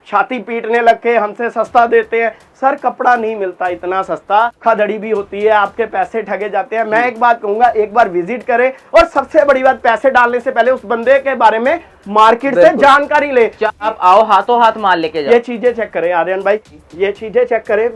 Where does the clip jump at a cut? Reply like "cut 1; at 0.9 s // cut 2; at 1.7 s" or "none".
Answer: cut 1; at 4.6 s // cut 2; at 13.8 s // cut 3; at 16.7 s